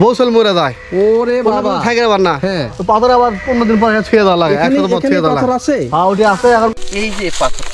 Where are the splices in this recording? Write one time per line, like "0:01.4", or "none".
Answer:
0:06.9